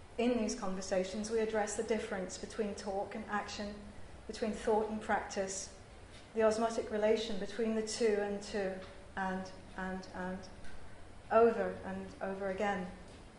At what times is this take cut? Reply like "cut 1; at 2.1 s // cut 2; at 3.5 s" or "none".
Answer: none